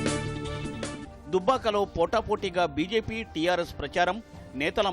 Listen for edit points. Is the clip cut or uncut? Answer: cut